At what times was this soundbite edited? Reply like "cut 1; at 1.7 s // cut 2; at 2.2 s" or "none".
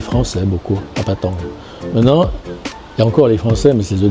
none